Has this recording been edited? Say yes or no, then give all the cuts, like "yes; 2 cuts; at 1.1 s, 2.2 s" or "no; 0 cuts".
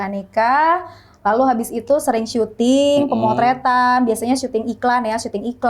no; 0 cuts